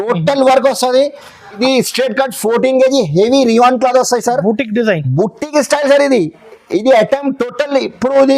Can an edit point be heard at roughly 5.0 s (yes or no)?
no